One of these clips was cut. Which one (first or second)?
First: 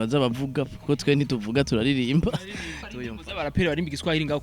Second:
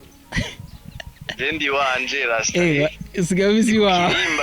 first